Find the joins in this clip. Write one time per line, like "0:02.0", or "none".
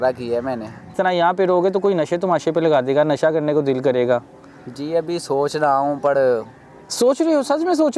0:00.9